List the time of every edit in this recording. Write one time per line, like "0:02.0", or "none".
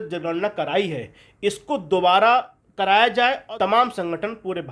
0:02.6
0:03.4